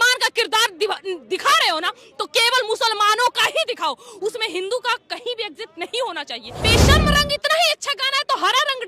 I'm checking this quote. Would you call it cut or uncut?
cut